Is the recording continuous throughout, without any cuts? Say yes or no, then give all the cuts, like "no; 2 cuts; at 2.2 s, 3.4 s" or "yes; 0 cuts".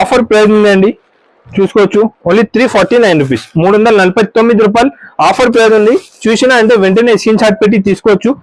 yes; 0 cuts